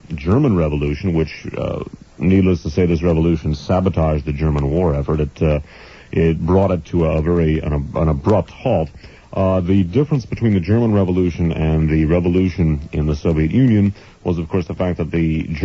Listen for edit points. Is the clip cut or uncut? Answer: uncut